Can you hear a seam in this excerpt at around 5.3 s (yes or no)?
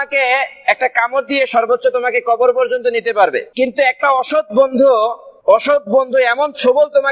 yes